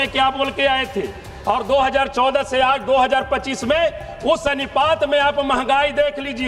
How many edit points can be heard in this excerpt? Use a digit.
0